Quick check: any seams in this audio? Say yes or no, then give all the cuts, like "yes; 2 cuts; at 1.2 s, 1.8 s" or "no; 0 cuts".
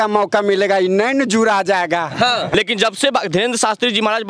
yes; 1 cut; at 2.5 s